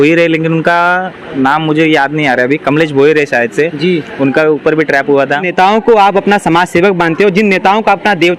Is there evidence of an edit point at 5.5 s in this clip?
yes; 1 cut; at 5.5 s

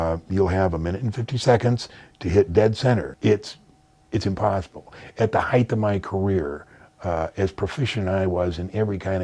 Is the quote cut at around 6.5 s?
no; 1 cut; at 3.1 s

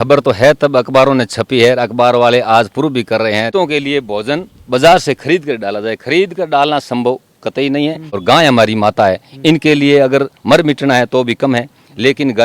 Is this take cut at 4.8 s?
no; 2 cuts; at 3.5 s, 8.1 s

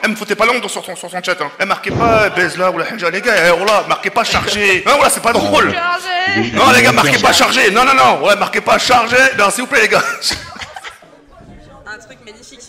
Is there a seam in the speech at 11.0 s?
yes; 1 cut; at 11.0 s

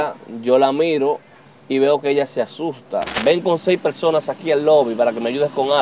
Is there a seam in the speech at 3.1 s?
yes; 1 cut; at 3.1 s

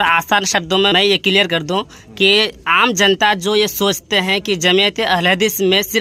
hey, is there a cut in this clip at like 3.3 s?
no; 1 cut; at 0.9 s

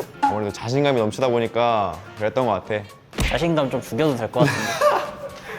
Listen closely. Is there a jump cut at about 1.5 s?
no; 1 cut; at 3.0 s

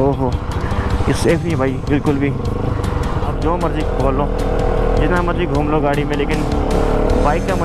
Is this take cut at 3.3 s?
yes; 1 cut; at 3.3 s

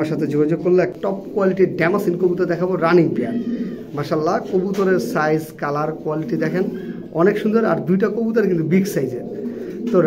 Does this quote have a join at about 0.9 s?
yes; 1 cut; at 0.9 s

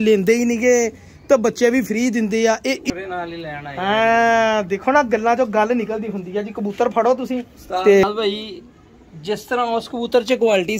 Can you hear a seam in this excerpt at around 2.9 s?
yes; 2 cuts; at 2.9 s, 8.0 s

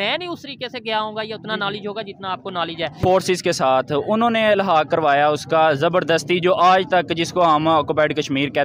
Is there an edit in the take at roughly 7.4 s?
no; 1 cut; at 2.9 s

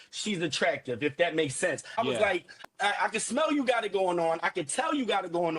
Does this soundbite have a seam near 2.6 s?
yes; 1 cut; at 2.6 s

